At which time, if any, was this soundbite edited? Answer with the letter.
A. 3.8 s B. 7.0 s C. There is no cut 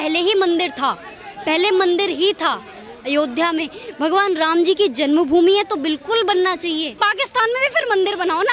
B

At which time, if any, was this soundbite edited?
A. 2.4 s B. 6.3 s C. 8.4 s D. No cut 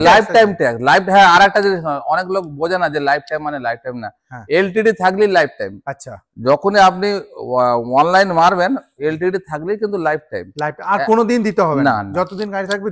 D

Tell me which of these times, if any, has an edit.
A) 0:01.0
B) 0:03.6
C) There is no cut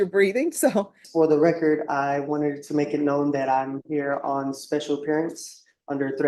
A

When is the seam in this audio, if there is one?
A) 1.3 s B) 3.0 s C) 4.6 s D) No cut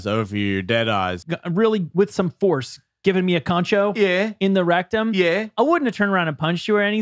A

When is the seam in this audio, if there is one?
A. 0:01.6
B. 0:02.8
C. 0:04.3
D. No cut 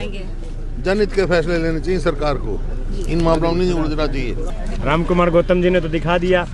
C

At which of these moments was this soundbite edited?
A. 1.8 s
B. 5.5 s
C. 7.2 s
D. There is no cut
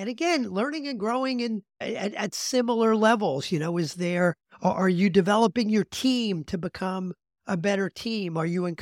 A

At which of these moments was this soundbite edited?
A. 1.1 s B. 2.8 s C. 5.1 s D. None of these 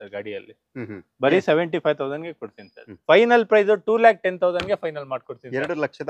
B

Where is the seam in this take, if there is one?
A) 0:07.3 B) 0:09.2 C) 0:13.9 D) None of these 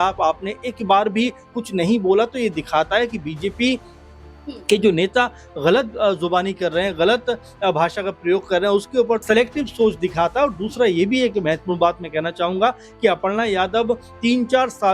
B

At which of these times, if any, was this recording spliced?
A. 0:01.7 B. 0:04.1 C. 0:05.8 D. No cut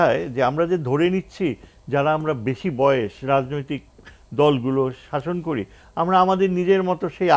D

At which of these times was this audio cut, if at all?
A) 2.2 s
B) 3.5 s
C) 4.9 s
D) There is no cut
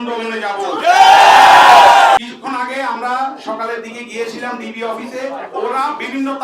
A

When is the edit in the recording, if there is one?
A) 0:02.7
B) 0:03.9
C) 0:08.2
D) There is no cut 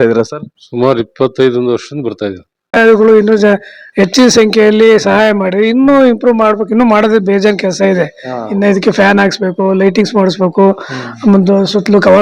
A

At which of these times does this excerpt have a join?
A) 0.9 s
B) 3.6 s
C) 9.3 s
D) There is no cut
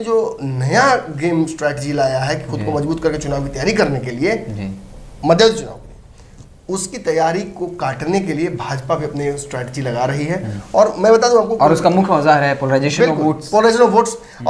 D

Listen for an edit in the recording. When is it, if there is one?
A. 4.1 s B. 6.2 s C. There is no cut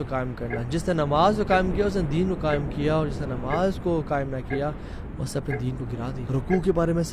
B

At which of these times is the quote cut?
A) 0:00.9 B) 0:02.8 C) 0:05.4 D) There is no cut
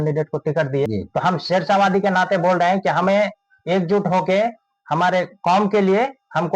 A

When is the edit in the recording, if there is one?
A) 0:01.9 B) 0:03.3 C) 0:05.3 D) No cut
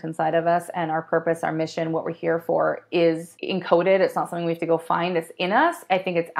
B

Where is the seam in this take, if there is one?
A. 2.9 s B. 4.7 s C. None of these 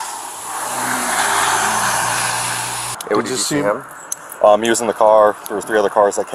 A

